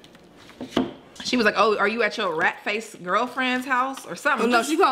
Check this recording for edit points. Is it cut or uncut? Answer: cut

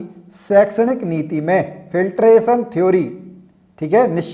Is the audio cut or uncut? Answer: uncut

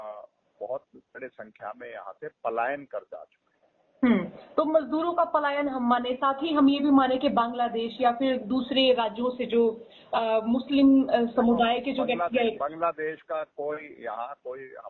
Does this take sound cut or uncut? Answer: uncut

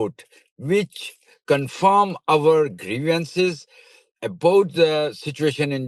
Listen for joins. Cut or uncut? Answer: uncut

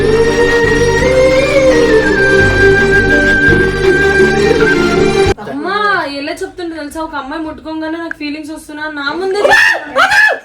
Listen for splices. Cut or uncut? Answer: cut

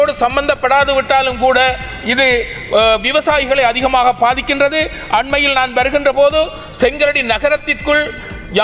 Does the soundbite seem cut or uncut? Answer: uncut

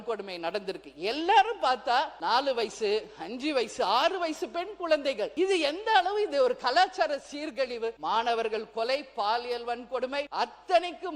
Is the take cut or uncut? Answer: cut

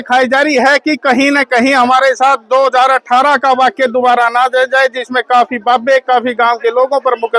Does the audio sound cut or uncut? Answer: uncut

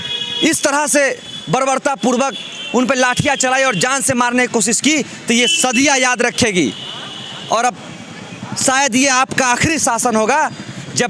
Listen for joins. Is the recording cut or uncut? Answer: uncut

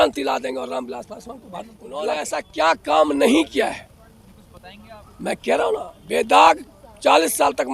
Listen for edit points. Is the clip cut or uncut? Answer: cut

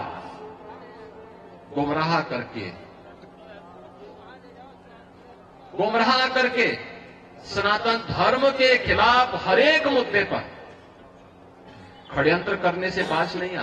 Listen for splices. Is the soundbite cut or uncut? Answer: uncut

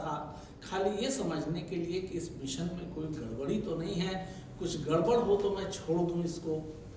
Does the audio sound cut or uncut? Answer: uncut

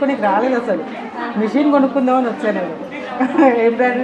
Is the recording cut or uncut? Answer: uncut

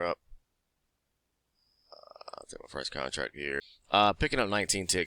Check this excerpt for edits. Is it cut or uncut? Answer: cut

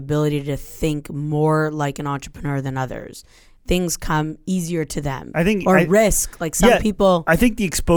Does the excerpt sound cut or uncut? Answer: cut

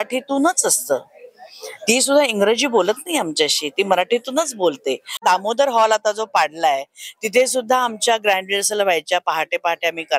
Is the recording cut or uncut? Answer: cut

